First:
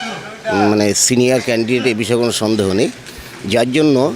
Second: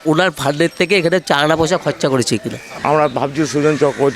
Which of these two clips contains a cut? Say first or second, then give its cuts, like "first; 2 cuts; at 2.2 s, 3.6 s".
second; 1 cut; at 2.7 s